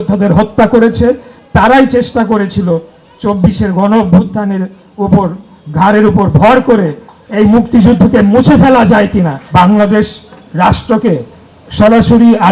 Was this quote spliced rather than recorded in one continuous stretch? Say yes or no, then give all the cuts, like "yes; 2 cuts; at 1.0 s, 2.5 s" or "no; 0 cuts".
yes; 1 cut; at 9.4 s